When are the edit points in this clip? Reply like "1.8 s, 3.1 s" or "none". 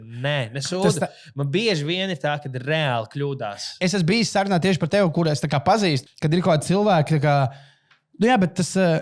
3.8 s, 6.1 s